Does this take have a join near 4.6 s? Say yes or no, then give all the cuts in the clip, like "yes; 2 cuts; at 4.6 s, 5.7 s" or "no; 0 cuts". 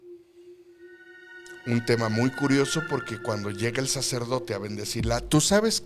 no; 0 cuts